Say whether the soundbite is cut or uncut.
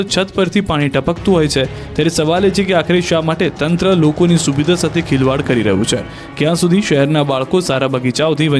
cut